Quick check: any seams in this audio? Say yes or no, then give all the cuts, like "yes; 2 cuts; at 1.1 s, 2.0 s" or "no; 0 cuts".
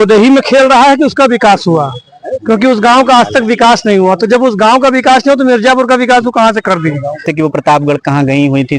yes; 1 cut; at 7.3 s